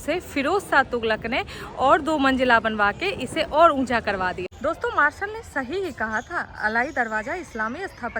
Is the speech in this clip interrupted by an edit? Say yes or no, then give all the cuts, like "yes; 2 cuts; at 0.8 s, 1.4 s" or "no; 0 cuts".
yes; 1 cut; at 4.5 s